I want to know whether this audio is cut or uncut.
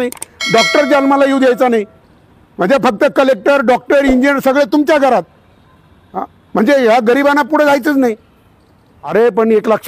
cut